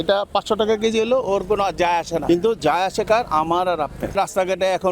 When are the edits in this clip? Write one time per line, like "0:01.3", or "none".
0:02.2
0:04.1